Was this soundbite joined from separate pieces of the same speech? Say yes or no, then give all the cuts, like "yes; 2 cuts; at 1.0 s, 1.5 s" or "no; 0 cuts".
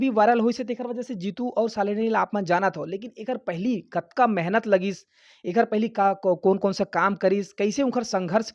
no; 0 cuts